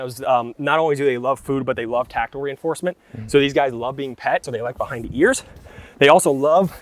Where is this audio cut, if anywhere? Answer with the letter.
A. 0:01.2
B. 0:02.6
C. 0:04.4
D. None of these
C